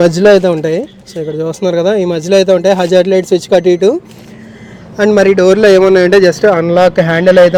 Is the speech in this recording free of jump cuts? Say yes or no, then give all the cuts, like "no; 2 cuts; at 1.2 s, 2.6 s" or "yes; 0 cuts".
yes; 0 cuts